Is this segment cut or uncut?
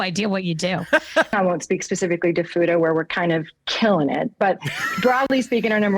cut